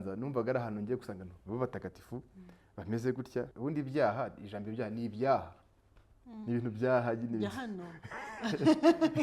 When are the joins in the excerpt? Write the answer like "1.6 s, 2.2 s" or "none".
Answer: 3.5 s